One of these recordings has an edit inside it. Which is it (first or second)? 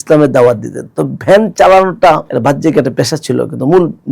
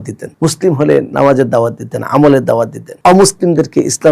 first